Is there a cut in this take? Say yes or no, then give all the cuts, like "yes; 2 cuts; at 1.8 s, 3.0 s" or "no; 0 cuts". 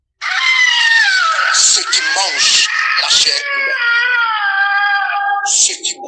no; 0 cuts